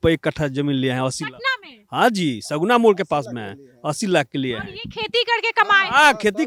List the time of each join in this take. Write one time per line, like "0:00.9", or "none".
none